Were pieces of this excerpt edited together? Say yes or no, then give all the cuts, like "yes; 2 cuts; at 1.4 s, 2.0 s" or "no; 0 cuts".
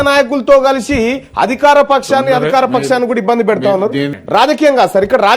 yes; 1 cut; at 4.2 s